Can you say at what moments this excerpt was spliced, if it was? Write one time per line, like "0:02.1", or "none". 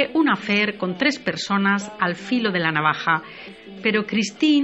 0:03.1